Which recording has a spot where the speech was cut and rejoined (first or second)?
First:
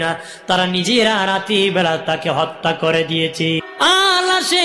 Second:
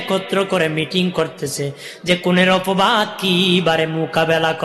first